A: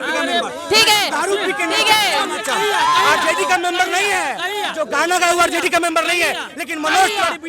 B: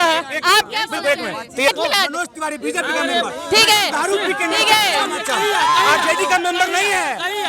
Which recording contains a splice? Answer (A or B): B